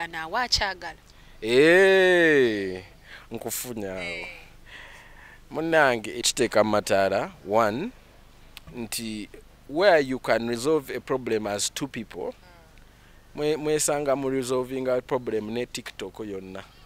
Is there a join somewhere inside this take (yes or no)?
yes